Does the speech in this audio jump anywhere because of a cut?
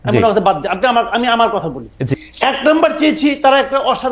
yes; 1 cut; at 2.1 s

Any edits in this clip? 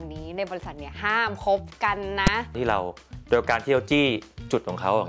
yes; 1 cut; at 2.5 s

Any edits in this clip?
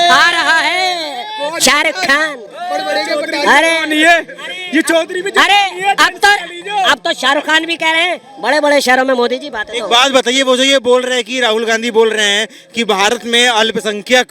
no; 0 cuts

